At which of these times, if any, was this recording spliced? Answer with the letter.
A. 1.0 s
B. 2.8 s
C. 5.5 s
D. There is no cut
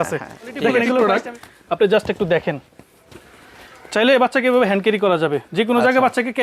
A